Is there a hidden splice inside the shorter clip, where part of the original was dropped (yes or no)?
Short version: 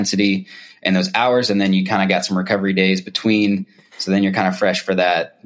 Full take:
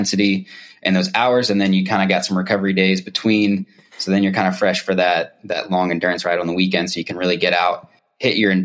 no